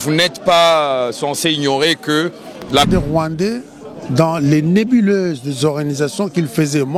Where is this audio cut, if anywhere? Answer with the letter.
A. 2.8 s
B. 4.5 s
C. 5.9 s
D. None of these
A